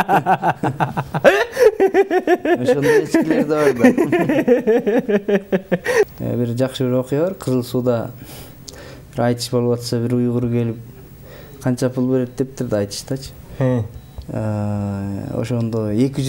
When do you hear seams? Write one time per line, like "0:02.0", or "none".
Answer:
0:06.1